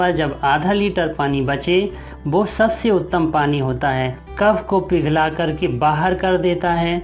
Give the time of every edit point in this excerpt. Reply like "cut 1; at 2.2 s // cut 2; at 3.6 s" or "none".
cut 1; at 4.2 s